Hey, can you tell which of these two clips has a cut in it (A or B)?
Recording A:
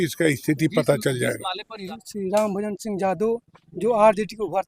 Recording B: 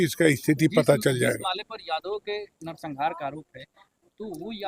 A